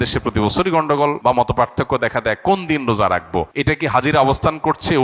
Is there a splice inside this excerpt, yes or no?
yes